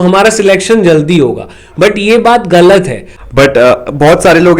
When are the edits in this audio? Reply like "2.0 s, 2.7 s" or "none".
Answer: 3.1 s

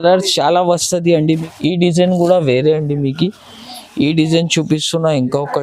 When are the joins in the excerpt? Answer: 1.4 s

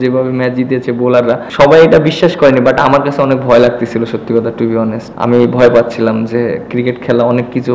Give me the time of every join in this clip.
1.5 s, 5.1 s

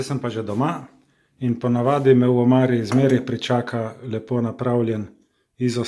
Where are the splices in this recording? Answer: none

